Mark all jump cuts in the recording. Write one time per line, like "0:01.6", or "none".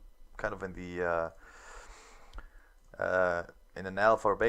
0:02.2

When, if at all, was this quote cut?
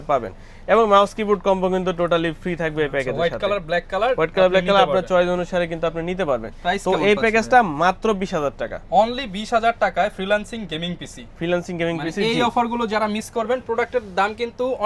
none

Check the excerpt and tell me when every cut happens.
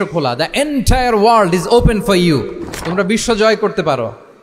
none

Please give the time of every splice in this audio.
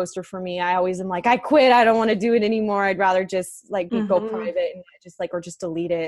none

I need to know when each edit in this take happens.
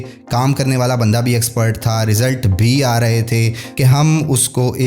0:03.7

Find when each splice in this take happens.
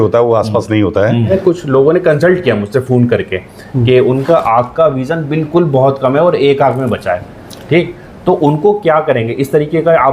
0:01.3

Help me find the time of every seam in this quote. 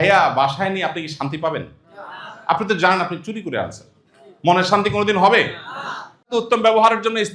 0:06.3

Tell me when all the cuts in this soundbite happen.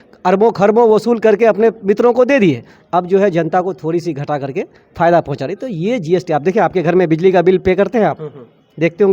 none

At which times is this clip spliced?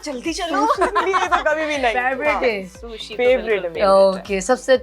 none

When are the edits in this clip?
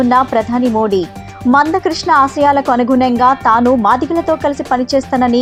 none

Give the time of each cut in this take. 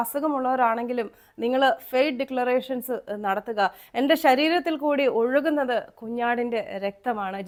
none

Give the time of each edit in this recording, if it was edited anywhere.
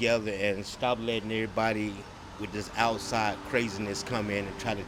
none

